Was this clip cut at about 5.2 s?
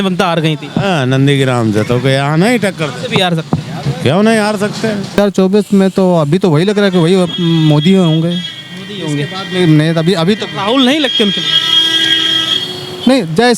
yes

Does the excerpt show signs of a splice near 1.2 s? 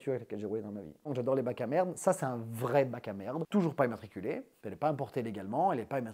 yes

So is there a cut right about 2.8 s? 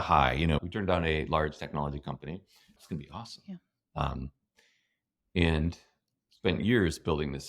yes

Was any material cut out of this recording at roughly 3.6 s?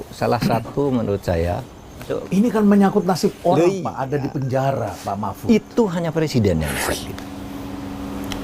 no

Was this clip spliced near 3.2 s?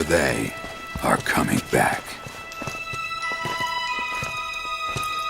no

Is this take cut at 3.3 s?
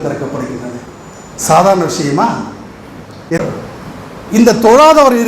yes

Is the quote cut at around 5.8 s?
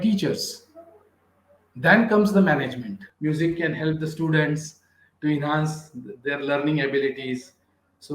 no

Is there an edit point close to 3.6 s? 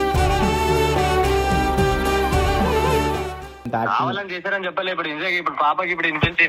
no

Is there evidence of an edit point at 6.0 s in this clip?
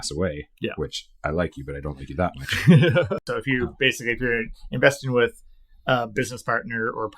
no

